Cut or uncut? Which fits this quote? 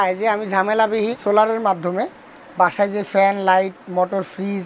cut